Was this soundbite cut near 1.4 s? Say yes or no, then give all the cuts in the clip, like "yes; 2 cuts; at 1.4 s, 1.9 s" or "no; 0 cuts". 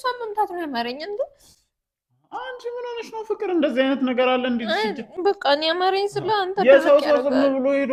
no; 0 cuts